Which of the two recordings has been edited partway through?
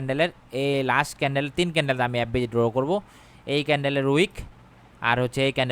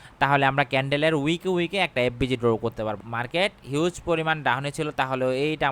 second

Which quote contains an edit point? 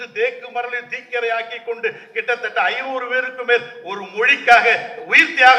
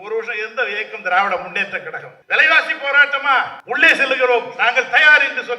second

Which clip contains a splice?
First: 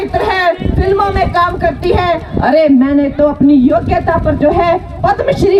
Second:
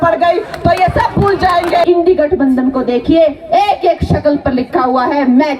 second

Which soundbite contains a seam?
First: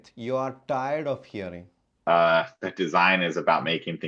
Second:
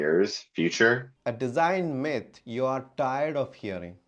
second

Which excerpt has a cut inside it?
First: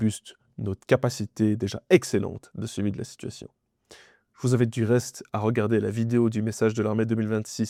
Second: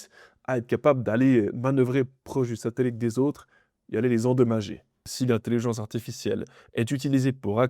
second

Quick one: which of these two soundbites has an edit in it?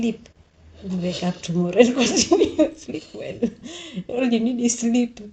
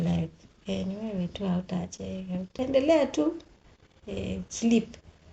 second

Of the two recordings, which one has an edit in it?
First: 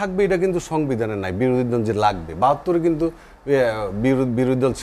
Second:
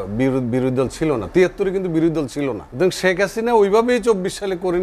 second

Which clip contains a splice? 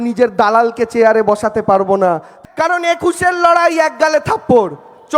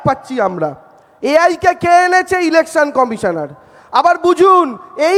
first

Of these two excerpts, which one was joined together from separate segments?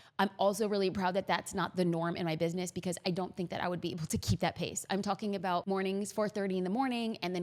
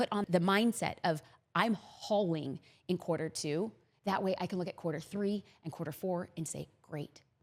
first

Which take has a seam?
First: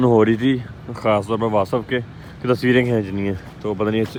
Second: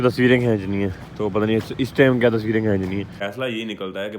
second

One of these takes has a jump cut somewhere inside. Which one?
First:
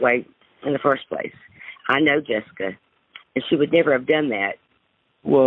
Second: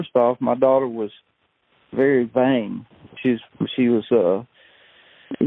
first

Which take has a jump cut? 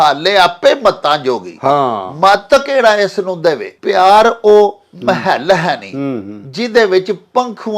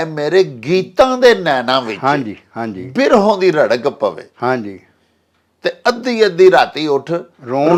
first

